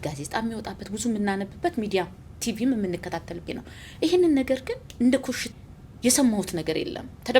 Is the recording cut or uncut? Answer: cut